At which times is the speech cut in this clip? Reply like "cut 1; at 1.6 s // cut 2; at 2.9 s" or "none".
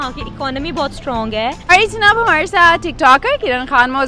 cut 1; at 1.6 s